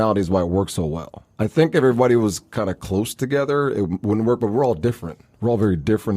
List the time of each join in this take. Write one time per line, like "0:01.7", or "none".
none